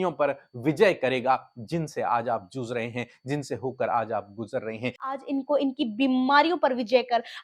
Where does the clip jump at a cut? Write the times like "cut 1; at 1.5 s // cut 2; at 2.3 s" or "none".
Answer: cut 1; at 5.2 s

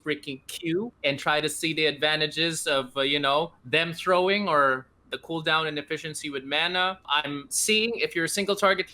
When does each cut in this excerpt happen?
cut 1; at 0.9 s // cut 2; at 7.0 s

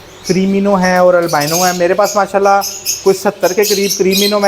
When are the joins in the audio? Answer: none

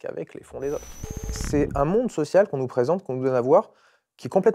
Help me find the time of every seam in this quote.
cut 1; at 1.4 s

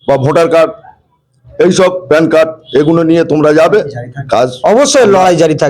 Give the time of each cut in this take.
cut 1; at 4.5 s

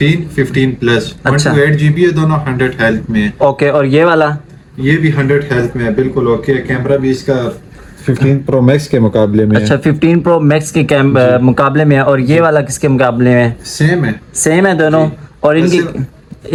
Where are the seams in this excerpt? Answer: none

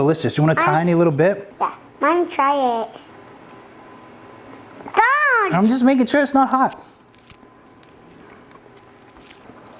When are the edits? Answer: cut 1; at 1.5 s // cut 2; at 3.1 s

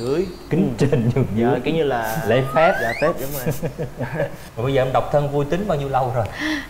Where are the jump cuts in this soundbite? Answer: cut 1; at 4.4 s

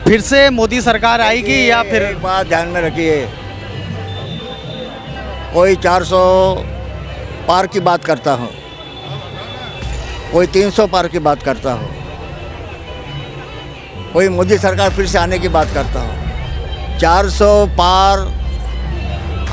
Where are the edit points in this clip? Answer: none

